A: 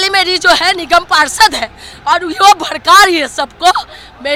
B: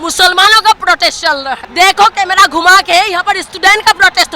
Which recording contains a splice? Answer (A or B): B